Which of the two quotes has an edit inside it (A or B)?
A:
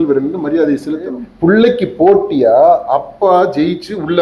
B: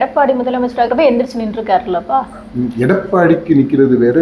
A